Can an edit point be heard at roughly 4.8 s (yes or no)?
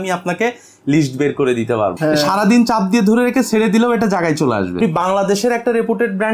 yes